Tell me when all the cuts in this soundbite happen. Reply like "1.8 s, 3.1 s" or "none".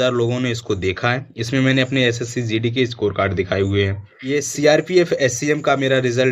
4.3 s